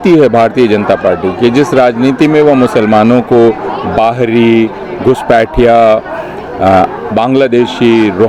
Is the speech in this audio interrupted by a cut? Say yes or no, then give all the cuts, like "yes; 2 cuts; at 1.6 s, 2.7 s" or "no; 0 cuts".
no; 0 cuts